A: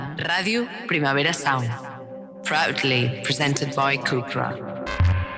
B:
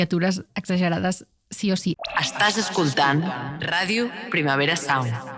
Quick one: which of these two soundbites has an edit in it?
B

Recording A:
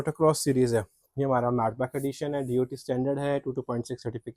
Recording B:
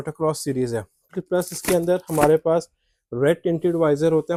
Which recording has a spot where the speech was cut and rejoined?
A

